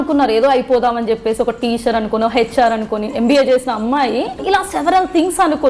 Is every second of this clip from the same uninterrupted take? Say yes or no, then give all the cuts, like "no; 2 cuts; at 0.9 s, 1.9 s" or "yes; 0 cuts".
no; 1 cut; at 4.4 s